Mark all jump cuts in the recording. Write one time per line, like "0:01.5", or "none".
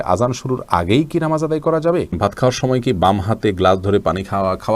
0:02.2